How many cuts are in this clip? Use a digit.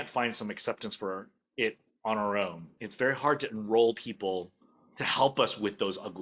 0